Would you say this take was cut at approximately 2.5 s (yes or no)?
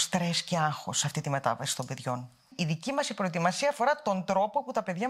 yes